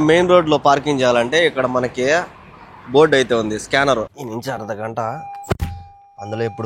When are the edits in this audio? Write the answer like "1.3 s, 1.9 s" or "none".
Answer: 4.2 s